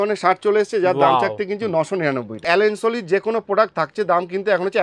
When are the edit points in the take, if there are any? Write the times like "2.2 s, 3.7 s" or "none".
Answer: 2.4 s